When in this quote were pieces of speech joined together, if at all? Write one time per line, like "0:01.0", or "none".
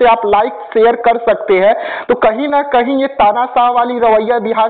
none